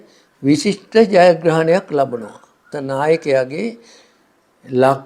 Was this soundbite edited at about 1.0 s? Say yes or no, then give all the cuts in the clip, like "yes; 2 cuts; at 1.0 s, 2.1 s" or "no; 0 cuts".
no; 1 cut; at 2.6 s